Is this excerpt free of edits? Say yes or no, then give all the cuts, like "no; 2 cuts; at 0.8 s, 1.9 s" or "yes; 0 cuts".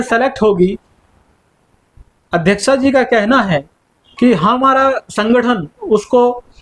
yes; 0 cuts